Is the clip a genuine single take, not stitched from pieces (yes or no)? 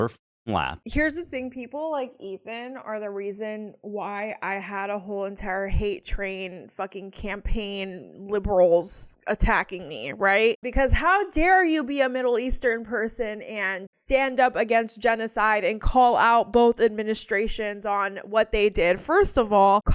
yes